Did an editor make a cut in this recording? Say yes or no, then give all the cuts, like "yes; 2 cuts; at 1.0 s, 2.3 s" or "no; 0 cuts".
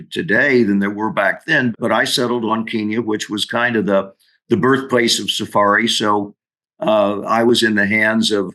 yes; 1 cut; at 1.8 s